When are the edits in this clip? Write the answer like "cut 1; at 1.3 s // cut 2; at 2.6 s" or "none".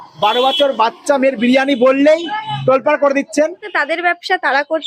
cut 1; at 3.7 s